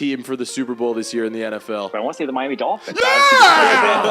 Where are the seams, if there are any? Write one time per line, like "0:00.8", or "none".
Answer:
0:01.9